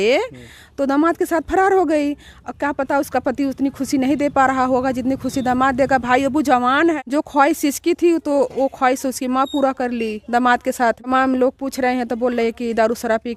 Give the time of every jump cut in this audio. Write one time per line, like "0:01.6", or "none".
0:07.0
0:11.1